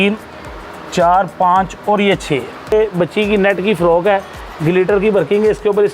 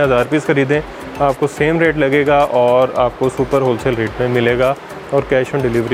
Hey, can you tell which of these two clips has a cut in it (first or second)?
first